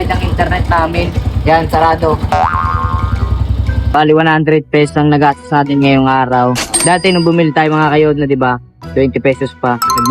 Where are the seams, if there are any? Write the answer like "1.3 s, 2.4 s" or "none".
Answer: 3.8 s